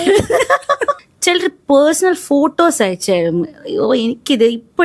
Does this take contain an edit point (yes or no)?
yes